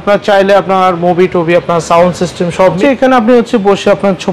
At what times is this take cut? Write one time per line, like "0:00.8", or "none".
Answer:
0:02.8